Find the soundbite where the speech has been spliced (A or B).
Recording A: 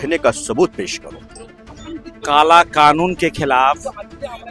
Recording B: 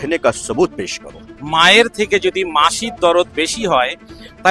B